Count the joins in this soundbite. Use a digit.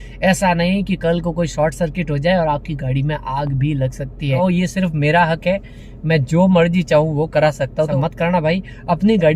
2